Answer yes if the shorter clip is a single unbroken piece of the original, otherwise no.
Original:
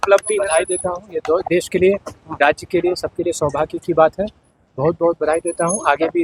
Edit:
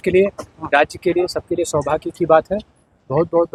yes